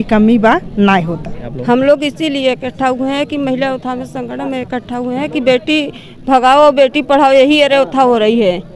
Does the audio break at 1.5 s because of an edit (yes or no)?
yes